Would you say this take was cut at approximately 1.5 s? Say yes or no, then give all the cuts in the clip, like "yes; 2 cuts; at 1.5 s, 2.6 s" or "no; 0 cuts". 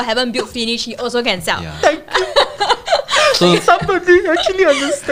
no; 0 cuts